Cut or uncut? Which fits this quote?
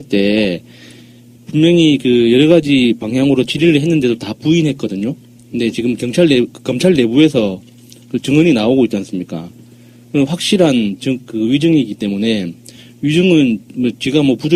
uncut